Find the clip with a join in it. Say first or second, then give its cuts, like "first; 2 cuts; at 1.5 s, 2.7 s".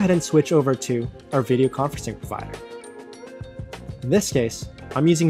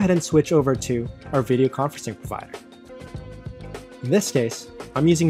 second; 2 cuts; at 2.5 s, 4.0 s